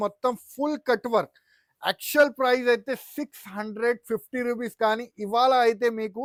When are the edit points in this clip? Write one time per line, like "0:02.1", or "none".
none